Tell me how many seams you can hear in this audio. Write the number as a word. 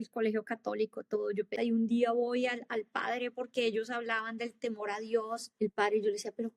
two